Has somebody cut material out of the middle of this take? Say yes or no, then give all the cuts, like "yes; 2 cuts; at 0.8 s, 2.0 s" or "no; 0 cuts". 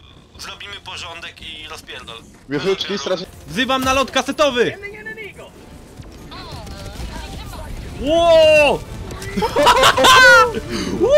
yes; 1 cut; at 3.2 s